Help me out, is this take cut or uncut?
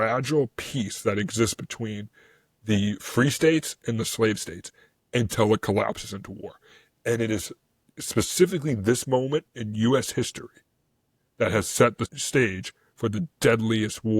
cut